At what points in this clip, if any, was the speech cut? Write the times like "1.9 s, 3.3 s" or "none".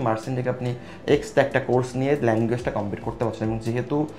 none